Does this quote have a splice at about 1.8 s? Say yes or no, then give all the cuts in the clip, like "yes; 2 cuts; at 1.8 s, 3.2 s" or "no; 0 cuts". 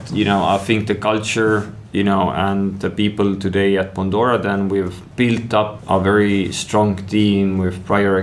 no; 2 cuts; at 5.0 s, 5.8 s